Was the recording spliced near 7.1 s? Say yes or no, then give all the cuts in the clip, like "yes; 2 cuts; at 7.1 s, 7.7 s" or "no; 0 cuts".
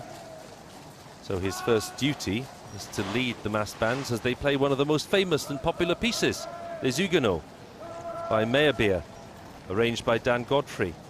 no; 1 cut; at 4.4 s